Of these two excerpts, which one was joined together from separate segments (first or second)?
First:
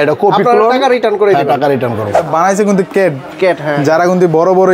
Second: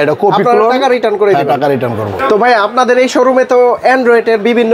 first